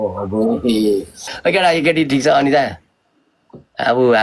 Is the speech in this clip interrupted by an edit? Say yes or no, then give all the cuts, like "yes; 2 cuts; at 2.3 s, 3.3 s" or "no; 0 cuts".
yes; 1 cut; at 1.3 s